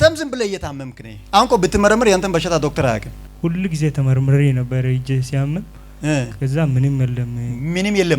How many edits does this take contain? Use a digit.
0